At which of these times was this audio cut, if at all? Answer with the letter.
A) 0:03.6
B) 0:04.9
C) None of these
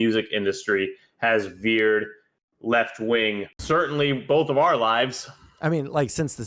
A